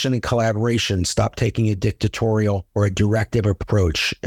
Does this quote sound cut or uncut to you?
uncut